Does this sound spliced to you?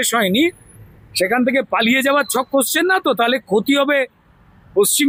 no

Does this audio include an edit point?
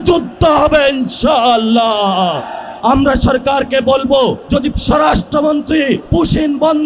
yes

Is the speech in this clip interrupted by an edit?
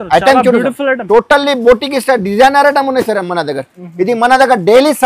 no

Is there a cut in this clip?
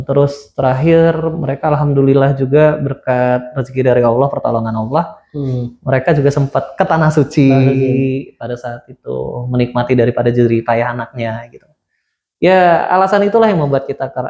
no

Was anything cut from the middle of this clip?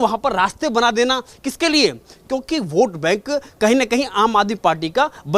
no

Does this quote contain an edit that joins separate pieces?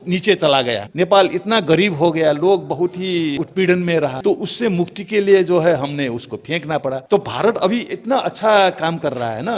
yes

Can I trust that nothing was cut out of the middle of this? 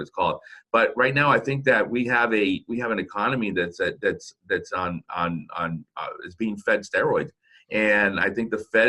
yes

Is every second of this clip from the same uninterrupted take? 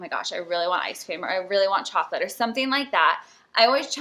yes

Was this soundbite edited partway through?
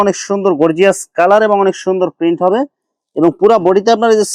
no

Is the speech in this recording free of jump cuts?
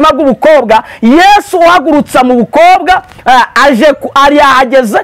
yes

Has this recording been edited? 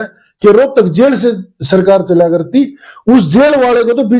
no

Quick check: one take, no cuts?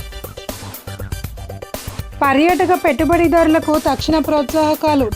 no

